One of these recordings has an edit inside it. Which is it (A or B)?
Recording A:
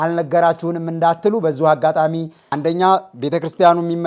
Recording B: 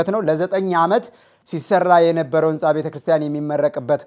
A